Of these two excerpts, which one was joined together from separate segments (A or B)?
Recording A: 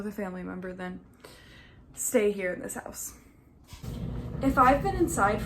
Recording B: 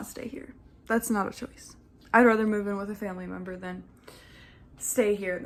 A